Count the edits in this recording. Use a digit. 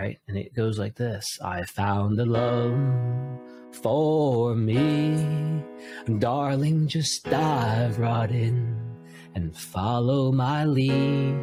0